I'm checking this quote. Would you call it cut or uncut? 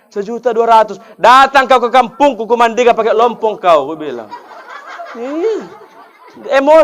uncut